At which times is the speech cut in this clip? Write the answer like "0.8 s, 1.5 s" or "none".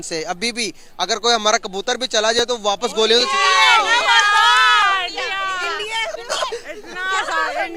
none